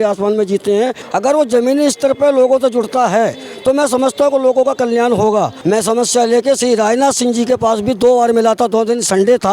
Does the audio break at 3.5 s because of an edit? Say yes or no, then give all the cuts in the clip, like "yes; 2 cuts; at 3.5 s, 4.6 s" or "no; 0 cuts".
no; 2 cuts; at 1.0 s, 5.6 s